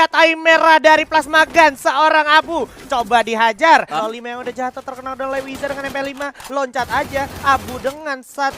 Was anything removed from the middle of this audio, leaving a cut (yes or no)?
yes